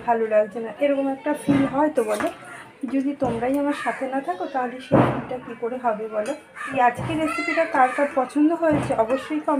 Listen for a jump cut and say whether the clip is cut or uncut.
cut